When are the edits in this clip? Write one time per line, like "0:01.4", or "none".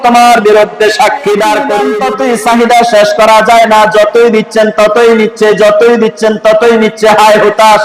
0:01.9